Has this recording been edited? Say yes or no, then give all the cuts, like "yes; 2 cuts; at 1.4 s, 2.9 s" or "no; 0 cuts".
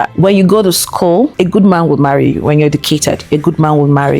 no; 0 cuts